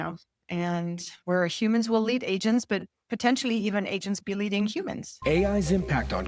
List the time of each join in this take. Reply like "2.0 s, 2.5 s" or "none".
5.0 s